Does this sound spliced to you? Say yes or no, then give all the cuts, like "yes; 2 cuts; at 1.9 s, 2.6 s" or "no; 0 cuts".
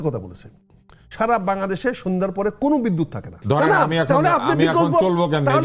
yes; 1 cut; at 3.3 s